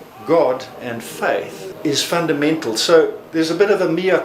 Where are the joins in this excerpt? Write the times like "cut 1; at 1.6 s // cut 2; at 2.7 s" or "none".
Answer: cut 1; at 1.6 s // cut 2; at 3.2 s